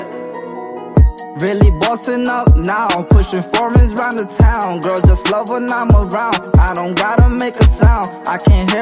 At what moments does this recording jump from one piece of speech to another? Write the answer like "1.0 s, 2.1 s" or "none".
none